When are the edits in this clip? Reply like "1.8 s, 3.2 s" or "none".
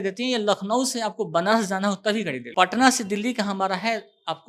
2.4 s

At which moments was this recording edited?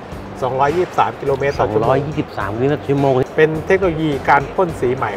3.2 s

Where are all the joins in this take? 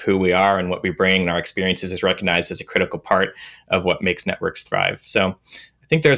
4.0 s

